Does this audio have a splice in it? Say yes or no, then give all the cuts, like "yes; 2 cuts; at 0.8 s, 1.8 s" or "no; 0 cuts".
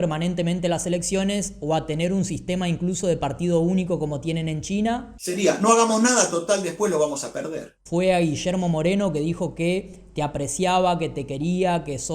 yes; 2 cuts; at 5.1 s, 7.7 s